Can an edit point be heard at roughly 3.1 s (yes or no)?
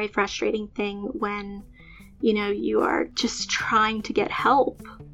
yes